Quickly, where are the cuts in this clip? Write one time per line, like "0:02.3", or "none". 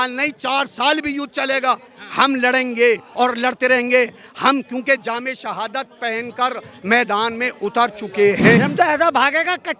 0:08.6